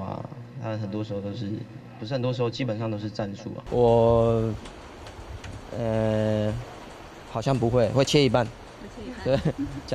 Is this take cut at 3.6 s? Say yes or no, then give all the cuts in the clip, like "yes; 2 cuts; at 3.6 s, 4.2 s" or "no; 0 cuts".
yes; 1 cut; at 3.6 s